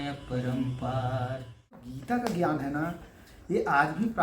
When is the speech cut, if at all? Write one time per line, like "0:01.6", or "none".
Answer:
0:01.8